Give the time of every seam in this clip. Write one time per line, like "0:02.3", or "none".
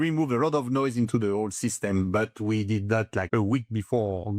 0:03.3